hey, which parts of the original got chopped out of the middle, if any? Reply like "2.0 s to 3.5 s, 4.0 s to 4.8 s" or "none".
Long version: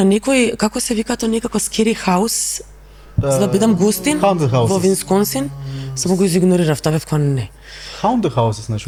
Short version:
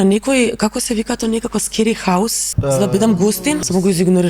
2.5 s to 3.1 s, 4.2 s to 5.9 s